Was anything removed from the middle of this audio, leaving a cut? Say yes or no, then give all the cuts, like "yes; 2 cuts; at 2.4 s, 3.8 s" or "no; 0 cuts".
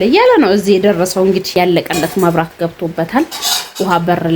yes; 1 cut; at 1.5 s